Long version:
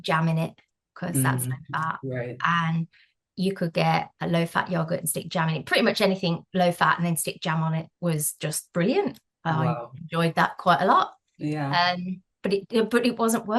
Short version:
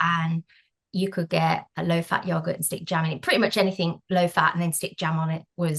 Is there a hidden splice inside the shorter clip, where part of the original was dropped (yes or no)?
no